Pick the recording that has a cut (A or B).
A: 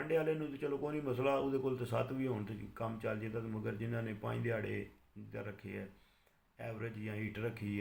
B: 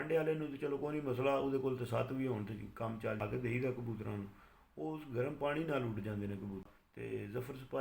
B